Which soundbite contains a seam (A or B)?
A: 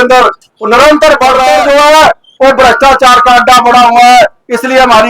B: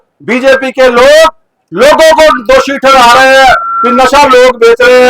A